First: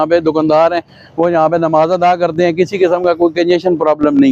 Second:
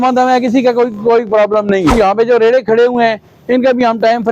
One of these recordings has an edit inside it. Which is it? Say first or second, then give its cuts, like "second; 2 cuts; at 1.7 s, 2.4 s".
second; 1 cut; at 1.9 s